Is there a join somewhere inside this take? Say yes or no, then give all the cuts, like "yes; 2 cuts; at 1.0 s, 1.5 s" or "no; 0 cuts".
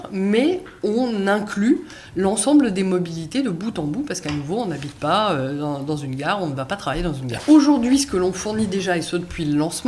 yes; 1 cut; at 7.4 s